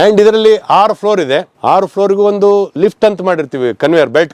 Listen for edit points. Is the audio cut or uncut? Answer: cut